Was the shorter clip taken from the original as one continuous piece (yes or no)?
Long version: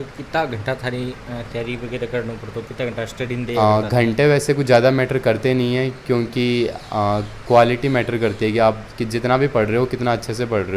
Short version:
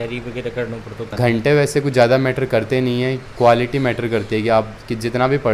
no